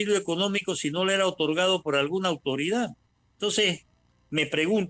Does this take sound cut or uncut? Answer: uncut